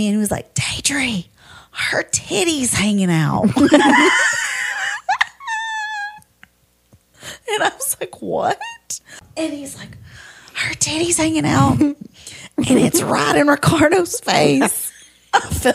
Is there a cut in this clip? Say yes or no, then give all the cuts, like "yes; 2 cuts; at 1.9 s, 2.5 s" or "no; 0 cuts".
yes; 1 cut; at 9.2 s